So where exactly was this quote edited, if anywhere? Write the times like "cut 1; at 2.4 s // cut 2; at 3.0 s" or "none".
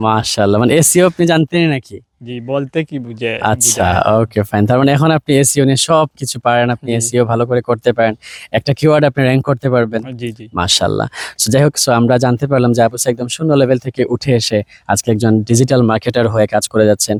none

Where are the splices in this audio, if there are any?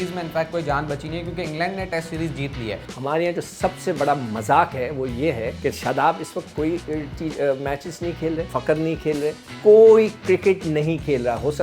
cut 1; at 2.9 s // cut 2; at 5.5 s // cut 3; at 8.5 s // cut 4; at 9.5 s

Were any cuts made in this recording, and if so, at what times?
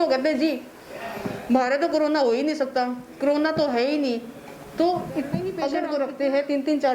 cut 1; at 5.7 s

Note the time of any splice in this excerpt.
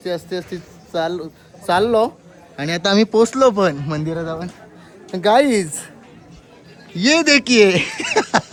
none

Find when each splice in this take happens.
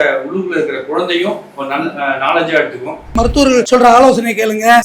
cut 1; at 3.1 s

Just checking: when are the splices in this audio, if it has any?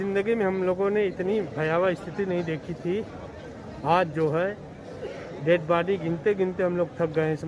none

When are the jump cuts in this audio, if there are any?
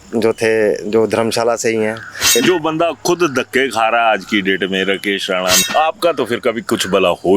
cut 1; at 2.3 s // cut 2; at 5.6 s

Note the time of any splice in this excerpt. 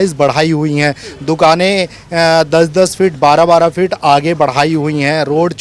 none

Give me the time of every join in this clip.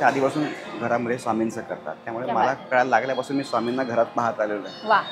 none

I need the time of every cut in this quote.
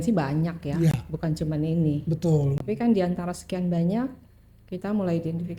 cut 1; at 2.6 s

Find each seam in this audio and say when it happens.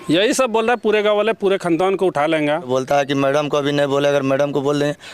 cut 1; at 2.7 s

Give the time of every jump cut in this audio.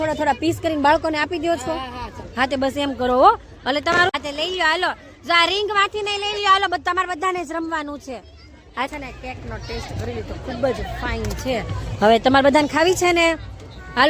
cut 1; at 4.1 s // cut 2; at 8.9 s

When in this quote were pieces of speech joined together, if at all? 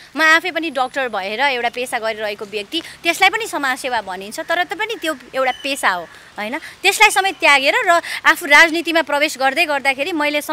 none

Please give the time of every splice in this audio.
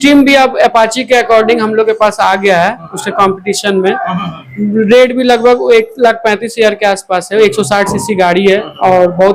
none

